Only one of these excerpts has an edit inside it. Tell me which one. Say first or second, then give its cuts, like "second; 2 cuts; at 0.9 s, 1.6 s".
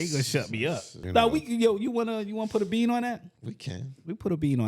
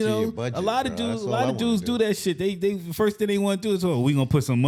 first; 1 cut; at 0.9 s